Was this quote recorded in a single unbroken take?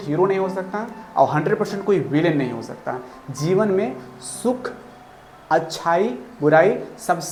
yes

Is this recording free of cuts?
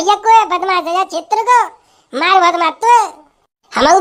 yes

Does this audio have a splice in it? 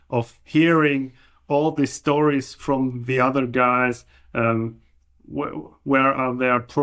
no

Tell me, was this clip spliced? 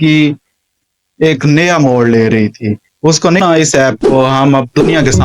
yes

